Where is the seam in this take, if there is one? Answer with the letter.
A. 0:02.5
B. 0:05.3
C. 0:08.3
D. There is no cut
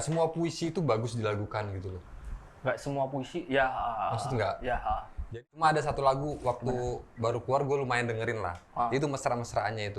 B